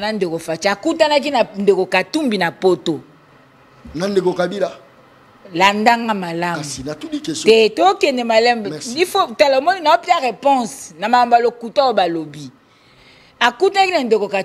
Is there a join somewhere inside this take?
no; 0 cuts

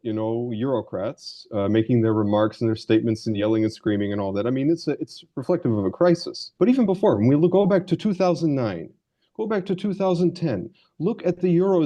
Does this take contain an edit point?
yes; 1 cut; at 6.4 s

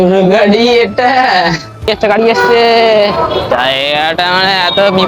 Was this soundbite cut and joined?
yes; 2 cuts; at 1.9 s, 3.5 s

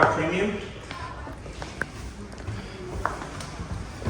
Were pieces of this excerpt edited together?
yes; 1 cut; at 1.3 s

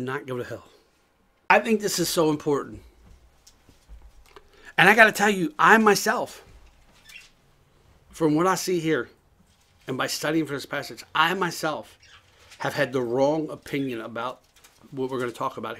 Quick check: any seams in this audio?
yes; 1 cut; at 1.4 s

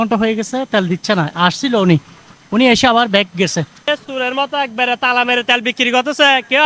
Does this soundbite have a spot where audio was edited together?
yes; 1 cut; at 3.9 s

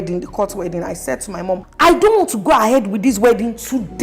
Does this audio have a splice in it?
yes; 1 cut; at 1.7 s

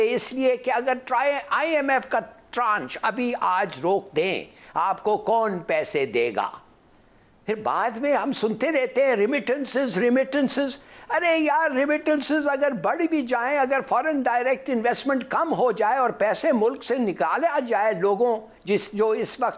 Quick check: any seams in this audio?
no; 0 cuts

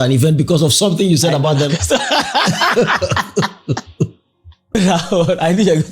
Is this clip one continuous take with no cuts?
no; 1 cut; at 4.8 s

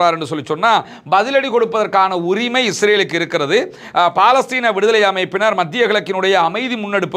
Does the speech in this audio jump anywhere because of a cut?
no; 0 cuts

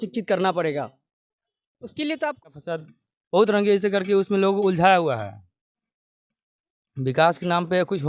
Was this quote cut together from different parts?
yes; 1 cut; at 2.4 s

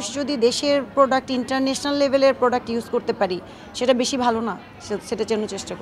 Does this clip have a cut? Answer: no; 0 cuts

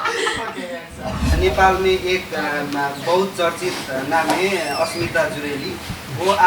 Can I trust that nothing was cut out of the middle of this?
no; 1 cut; at 1.4 s

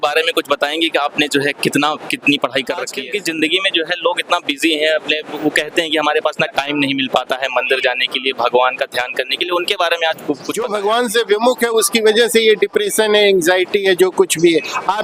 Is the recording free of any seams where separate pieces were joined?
no; 2 cuts; at 3.0 s, 10.5 s

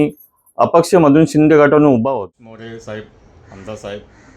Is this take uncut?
no; 1 cut; at 2.1 s

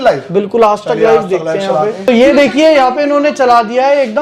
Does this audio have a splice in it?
no; 0 cuts

